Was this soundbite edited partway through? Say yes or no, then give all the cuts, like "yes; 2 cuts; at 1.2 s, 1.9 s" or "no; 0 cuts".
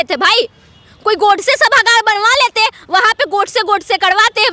no; 0 cuts